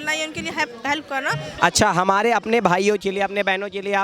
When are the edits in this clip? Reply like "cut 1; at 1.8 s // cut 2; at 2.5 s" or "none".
cut 1; at 1.5 s